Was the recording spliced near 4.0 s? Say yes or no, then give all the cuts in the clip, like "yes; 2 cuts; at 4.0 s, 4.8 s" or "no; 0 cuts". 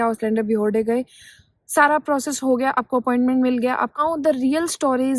yes; 1 cut; at 4.0 s